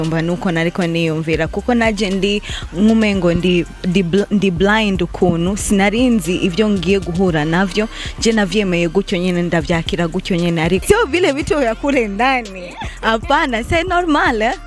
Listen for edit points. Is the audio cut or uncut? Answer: cut